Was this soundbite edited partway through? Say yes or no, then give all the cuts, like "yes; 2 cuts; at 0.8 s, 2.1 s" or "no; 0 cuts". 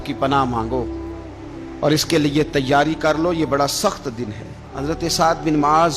yes; 1 cut; at 4.7 s